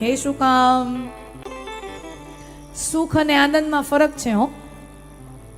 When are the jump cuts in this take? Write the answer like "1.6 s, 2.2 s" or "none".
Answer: 1.4 s